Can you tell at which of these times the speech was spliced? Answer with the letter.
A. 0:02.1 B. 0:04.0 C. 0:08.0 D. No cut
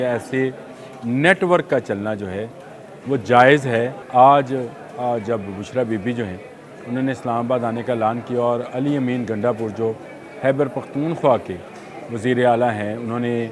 B